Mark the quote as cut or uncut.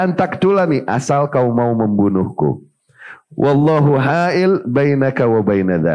uncut